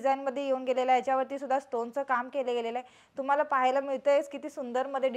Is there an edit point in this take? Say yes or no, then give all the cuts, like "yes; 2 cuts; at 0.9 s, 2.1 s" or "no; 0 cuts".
no; 0 cuts